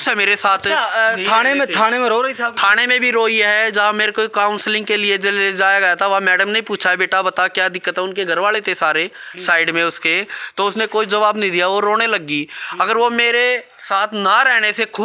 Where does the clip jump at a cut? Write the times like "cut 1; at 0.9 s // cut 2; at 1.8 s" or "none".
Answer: none